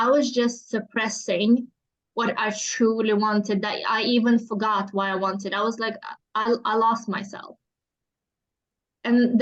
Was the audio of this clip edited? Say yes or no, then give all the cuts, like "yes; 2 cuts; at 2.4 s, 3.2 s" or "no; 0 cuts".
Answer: no; 0 cuts